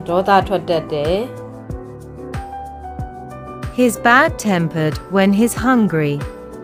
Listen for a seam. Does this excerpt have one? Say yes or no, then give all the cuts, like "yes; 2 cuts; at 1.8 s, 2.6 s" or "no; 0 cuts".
no; 0 cuts